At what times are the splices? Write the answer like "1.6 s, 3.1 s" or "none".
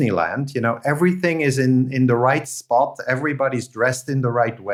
none